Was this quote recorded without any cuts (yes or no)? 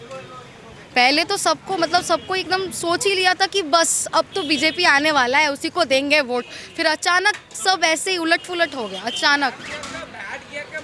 yes